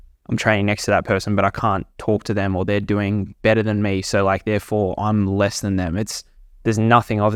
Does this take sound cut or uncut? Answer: uncut